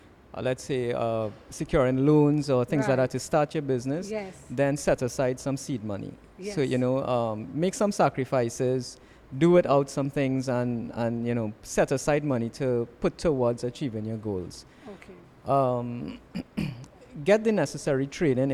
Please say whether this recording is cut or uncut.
uncut